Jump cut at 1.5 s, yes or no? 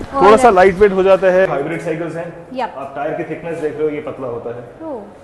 yes